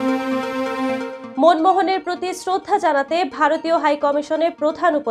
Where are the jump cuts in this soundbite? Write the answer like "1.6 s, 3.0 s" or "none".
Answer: 1.2 s